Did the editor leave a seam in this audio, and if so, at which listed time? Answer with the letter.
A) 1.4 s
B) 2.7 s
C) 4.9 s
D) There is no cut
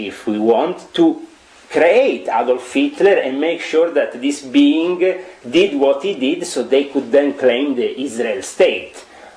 D